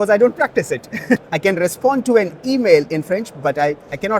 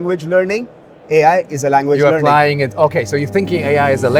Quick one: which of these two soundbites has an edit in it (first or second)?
first